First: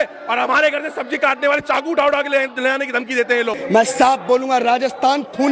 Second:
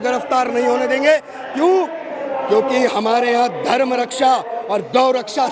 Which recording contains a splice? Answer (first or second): first